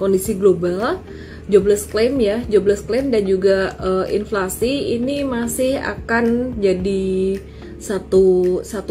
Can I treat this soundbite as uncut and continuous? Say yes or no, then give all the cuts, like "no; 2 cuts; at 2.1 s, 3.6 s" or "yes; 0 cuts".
yes; 0 cuts